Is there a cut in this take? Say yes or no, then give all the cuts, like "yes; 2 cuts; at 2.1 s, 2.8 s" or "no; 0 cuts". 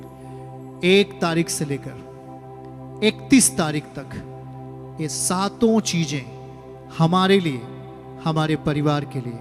no; 0 cuts